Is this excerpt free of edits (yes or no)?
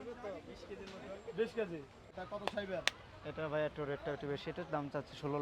no